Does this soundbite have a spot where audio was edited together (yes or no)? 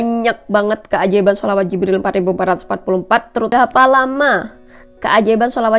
yes